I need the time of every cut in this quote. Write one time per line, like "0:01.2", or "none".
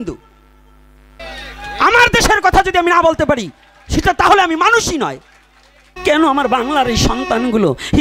0:01.2
0:05.9